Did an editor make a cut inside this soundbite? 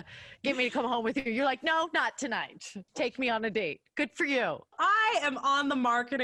no; 0 cuts

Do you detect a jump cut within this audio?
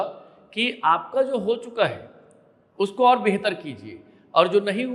no; 0 cuts

